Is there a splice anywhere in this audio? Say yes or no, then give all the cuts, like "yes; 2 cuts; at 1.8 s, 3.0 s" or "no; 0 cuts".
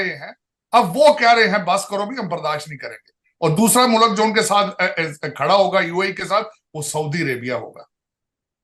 no; 0 cuts